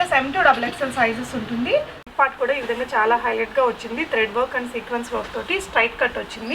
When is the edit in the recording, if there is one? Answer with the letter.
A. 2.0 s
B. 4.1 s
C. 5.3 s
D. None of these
A